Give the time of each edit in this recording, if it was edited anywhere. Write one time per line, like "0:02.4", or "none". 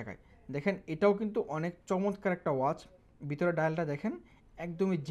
none